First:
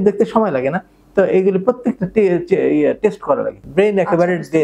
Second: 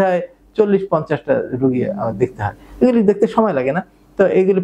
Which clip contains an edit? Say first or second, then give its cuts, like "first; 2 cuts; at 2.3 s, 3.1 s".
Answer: first; 1 cut; at 3.6 s